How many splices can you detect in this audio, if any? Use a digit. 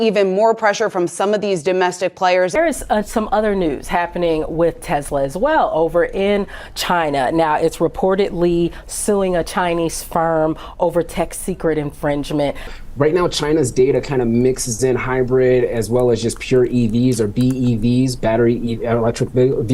2